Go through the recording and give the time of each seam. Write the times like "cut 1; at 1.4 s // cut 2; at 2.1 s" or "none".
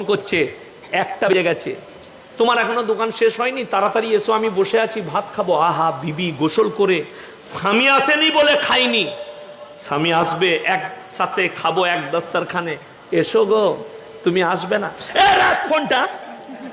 cut 1; at 1.3 s